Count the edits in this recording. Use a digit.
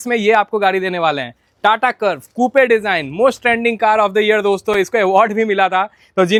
0